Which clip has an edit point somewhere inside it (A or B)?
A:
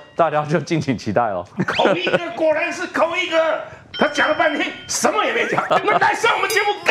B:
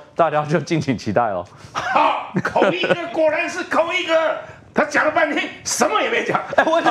A